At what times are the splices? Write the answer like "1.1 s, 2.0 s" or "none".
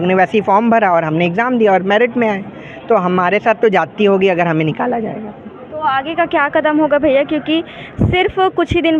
none